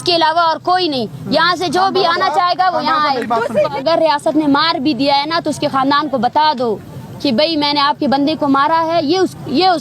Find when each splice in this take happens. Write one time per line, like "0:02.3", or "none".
0:03.8